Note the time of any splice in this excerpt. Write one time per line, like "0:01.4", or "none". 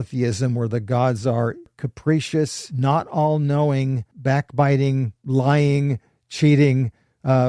0:01.8
0:02.6
0:04.1
0:05.1